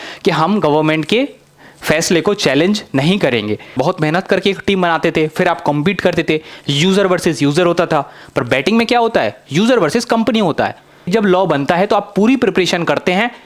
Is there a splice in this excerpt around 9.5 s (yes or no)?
no